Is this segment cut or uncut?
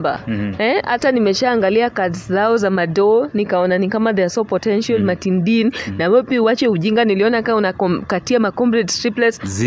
uncut